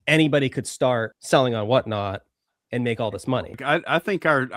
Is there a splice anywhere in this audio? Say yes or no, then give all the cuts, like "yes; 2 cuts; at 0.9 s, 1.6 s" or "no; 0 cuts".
yes; 2 cuts; at 1.1 s, 3.6 s